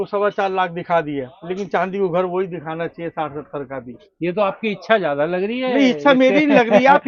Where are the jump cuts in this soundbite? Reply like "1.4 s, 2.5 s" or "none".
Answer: none